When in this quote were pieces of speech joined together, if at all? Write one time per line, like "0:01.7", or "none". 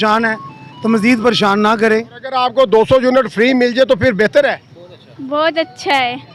0:02.2